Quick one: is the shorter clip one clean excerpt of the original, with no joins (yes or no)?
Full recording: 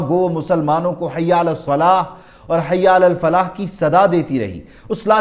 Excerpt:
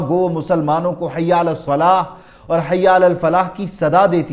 yes